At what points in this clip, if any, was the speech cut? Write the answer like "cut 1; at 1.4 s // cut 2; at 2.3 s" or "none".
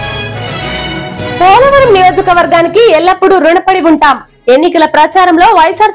none